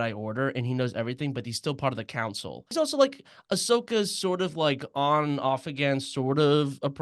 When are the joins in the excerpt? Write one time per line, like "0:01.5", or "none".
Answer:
0:02.7